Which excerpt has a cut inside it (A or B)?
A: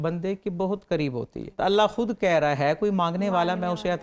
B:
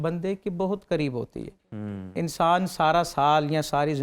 A